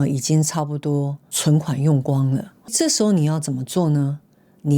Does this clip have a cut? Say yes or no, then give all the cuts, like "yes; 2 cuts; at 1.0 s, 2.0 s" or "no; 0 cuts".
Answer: yes; 1 cut; at 2.7 s